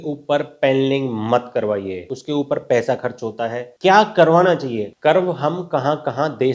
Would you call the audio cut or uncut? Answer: cut